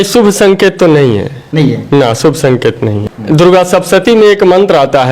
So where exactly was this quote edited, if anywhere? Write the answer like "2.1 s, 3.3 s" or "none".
3.0 s